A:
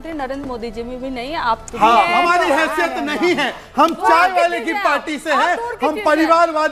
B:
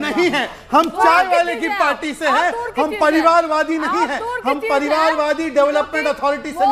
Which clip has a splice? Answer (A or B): A